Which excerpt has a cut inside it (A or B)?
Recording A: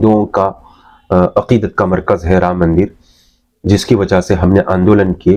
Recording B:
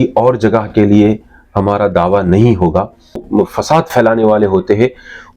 B